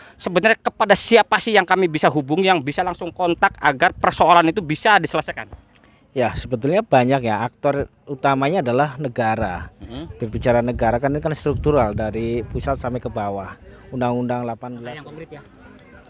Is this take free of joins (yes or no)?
no